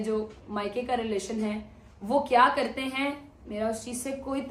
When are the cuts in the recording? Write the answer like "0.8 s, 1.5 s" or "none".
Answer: none